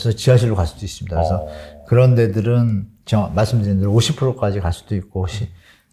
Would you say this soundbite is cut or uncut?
uncut